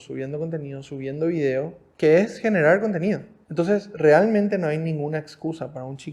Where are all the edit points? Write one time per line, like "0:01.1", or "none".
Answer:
0:01.8
0:03.4